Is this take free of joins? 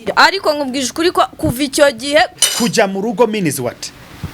no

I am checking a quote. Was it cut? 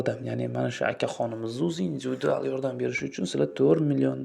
no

